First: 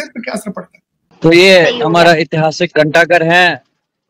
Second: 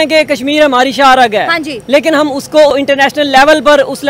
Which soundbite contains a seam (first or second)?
first